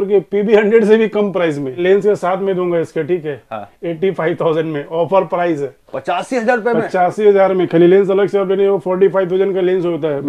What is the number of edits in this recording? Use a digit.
1